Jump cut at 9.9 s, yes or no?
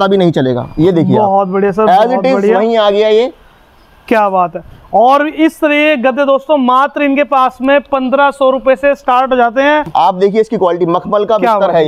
yes